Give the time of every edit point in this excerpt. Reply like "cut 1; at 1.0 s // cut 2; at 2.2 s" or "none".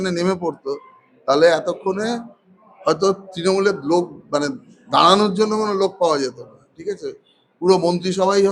none